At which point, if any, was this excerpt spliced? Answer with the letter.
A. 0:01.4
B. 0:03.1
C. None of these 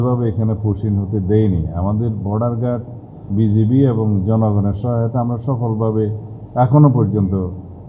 C